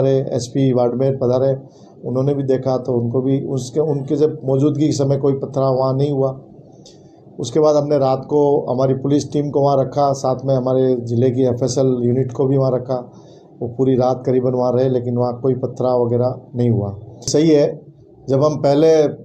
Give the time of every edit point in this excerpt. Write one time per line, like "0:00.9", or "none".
0:17.3